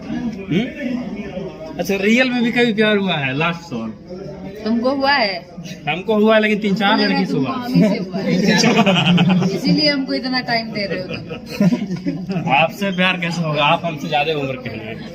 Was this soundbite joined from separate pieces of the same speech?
no; 0 cuts

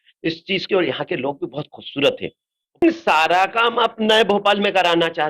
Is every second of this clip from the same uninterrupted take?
no; 1 cut; at 2.8 s

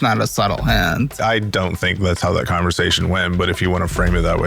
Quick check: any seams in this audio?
yes; 1 cut; at 1.1 s

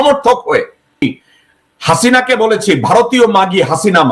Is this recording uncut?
no; 1 cut; at 1.0 s

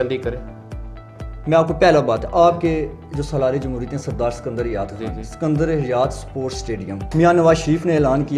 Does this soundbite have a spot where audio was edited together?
yes; 1 cut; at 7.0 s

